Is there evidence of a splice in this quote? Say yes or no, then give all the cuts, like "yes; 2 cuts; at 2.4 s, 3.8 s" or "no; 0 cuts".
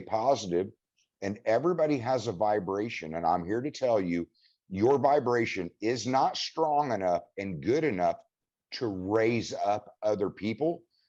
no; 0 cuts